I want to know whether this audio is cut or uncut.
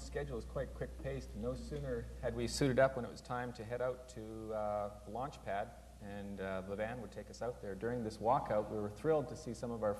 cut